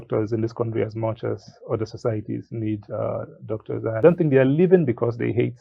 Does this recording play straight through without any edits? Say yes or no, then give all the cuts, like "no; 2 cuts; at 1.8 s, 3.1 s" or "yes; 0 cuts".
no; 1 cut; at 4.0 s